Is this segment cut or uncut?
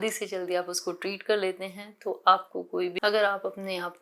cut